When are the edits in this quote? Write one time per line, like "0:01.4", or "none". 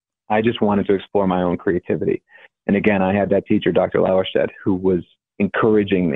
0:05.2